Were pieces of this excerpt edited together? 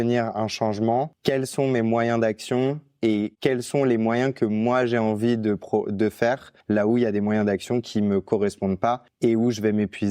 yes; 3 cuts; at 1.1 s, 6.5 s, 9.1 s

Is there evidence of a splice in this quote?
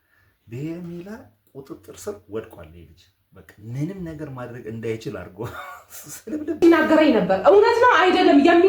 yes; 1 cut; at 6.6 s

